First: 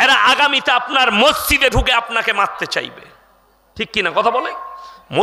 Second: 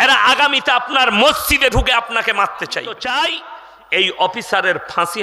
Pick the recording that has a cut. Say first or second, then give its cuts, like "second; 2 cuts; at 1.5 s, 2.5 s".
second; 1 cut; at 2.9 s